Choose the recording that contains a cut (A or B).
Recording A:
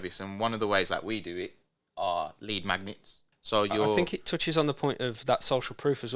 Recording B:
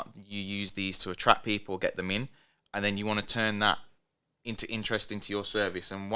A